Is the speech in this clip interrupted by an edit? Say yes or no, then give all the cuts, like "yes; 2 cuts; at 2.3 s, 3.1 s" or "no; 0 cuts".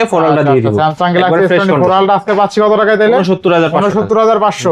no; 0 cuts